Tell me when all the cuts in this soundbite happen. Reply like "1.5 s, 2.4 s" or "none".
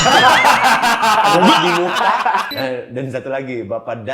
2.5 s